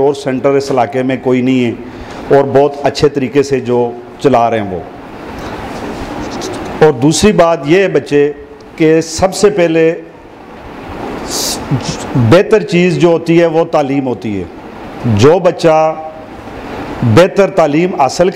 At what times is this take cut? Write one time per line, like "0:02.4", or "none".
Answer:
none